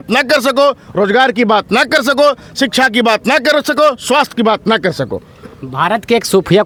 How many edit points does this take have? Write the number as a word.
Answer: zero